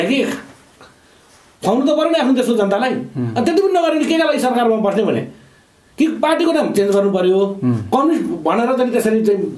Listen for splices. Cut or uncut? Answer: uncut